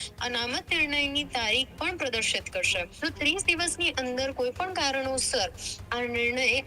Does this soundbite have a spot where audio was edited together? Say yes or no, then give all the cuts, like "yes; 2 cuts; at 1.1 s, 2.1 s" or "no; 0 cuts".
yes; 1 cut; at 2.9 s